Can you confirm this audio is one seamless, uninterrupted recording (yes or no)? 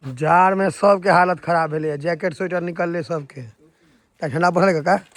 yes